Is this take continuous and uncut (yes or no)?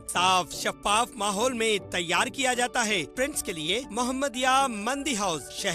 no